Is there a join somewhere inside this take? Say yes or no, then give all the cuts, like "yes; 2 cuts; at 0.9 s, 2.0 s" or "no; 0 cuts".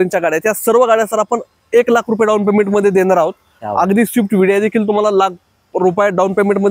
no; 0 cuts